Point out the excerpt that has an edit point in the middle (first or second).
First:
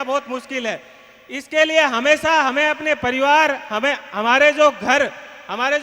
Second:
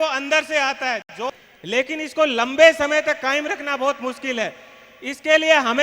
second